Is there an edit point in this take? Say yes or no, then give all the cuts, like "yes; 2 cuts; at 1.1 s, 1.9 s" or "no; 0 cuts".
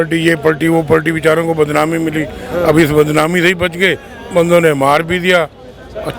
no; 0 cuts